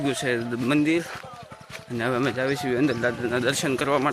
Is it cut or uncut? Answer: uncut